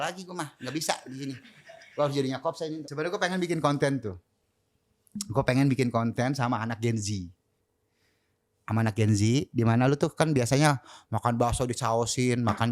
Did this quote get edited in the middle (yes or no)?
yes